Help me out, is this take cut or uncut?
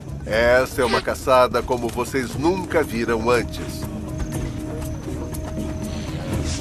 cut